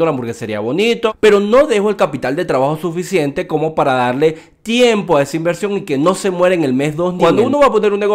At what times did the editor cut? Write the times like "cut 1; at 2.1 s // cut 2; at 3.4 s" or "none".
cut 1; at 1.1 s // cut 2; at 7.1 s